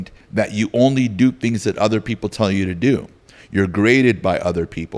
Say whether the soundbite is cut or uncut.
uncut